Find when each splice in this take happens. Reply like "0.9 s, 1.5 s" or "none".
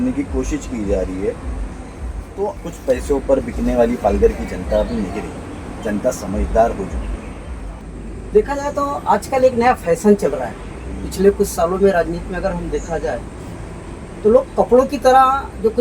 2.6 s, 7.8 s